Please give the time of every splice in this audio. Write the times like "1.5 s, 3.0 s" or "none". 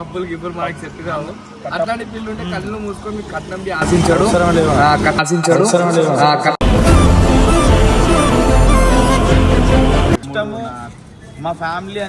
10.2 s